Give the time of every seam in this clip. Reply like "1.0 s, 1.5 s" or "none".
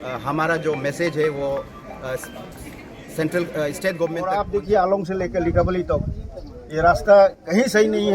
4.3 s